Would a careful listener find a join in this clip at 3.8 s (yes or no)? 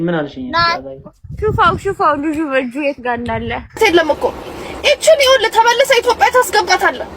yes